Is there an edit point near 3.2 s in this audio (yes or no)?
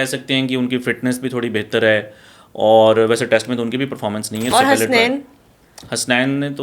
no